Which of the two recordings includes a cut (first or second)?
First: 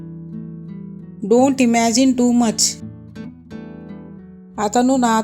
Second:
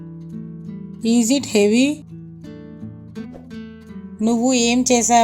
second